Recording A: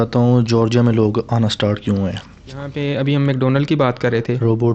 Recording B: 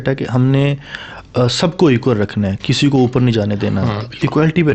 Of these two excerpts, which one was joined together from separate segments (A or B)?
A